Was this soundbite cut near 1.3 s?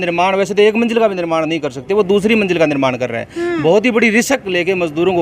no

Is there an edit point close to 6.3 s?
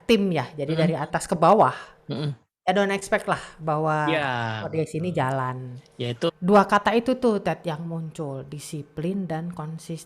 yes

